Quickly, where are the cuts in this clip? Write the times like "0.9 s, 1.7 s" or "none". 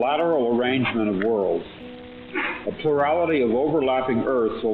none

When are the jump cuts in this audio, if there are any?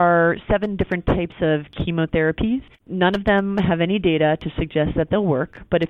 2.8 s

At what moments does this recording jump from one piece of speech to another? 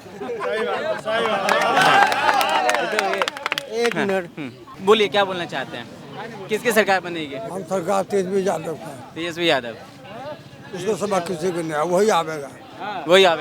none

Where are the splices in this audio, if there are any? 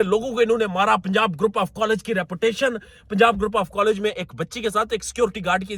none

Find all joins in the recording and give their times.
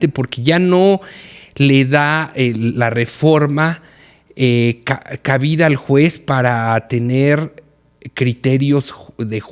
none

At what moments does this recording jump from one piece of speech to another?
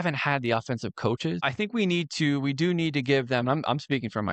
1.5 s

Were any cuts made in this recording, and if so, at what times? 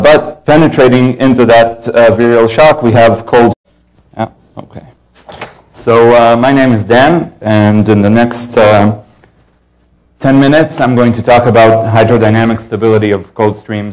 none

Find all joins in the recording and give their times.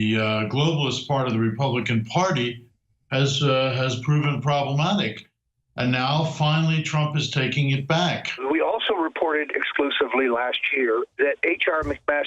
8.4 s

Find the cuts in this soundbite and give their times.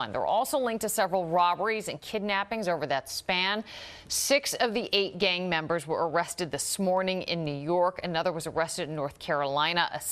none

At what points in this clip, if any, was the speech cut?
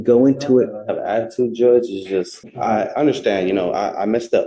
2.4 s

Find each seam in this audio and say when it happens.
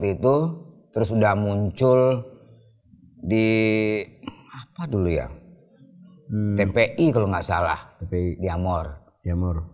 none

